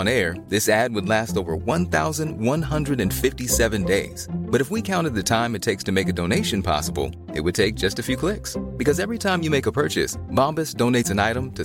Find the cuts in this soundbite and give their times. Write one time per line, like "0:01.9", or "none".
none